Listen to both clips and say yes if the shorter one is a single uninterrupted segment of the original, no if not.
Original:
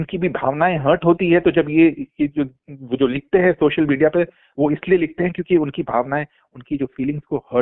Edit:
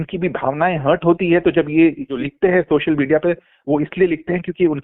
no